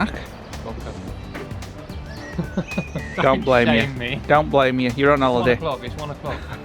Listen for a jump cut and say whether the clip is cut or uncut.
uncut